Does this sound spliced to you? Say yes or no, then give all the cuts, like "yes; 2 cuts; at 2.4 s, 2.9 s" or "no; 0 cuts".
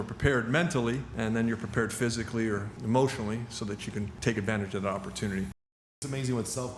yes; 4 cuts; at 1.1 s, 2.7 s, 4.1 s, 5.8 s